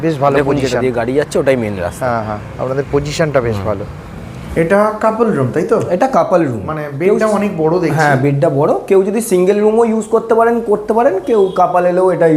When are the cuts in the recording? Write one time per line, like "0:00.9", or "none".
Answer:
0:04.5